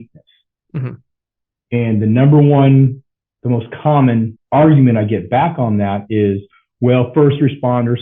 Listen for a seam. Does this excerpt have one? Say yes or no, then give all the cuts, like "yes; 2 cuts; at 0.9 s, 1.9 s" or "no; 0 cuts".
yes; 1 cut; at 4.4 s